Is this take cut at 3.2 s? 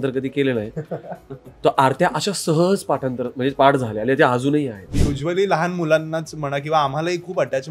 no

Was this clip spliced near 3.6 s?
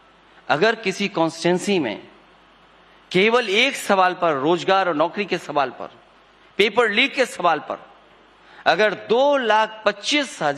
yes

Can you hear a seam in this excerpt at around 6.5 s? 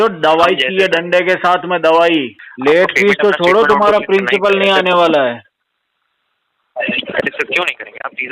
no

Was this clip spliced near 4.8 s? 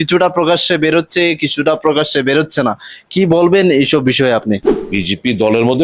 yes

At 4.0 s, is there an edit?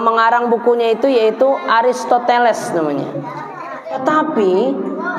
yes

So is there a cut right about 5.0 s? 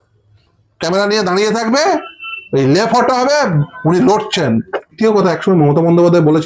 yes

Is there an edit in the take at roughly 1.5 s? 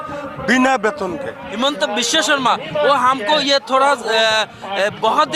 yes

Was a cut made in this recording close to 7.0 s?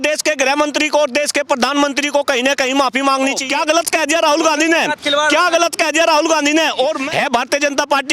yes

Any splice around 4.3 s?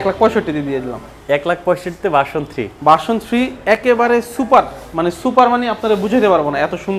no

